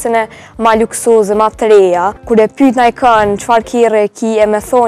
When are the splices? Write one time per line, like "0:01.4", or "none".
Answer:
0:02.2